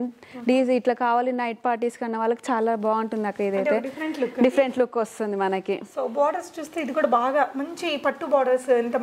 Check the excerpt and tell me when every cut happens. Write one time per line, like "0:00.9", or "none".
none